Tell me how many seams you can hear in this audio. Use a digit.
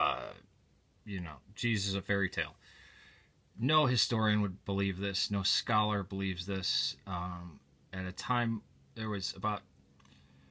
0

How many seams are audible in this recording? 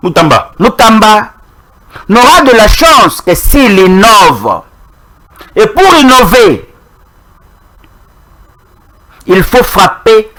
0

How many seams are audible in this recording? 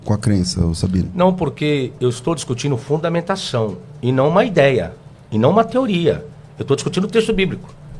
0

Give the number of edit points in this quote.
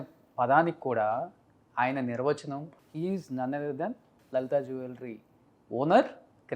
2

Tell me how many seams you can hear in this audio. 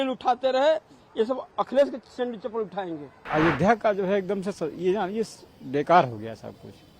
1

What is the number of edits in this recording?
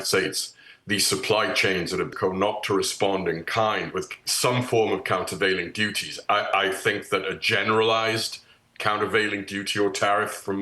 1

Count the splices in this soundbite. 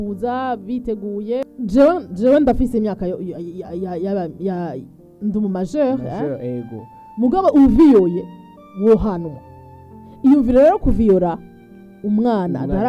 1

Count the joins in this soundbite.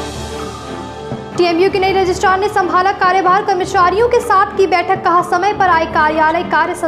0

